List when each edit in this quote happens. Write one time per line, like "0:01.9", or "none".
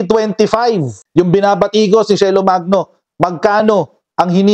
0:01.0